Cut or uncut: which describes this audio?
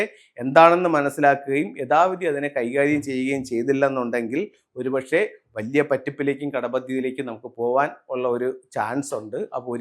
uncut